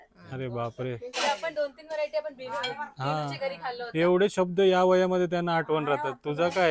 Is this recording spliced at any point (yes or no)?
no